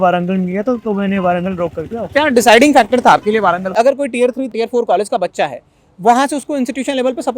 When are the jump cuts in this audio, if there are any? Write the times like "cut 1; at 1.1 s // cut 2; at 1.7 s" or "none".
cut 1; at 3.7 s